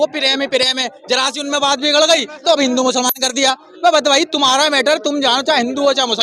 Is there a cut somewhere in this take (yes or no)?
no